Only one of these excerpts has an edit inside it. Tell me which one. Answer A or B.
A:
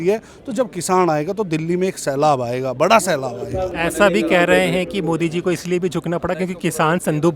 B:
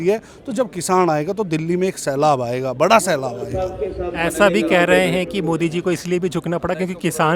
A